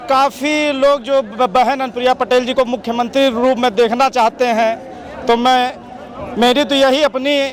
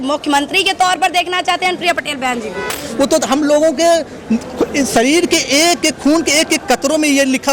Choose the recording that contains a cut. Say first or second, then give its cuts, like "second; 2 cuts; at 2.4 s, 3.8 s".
second; 1 cut; at 2.8 s